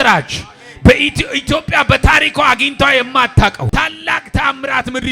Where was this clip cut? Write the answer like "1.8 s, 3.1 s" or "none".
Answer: 3.6 s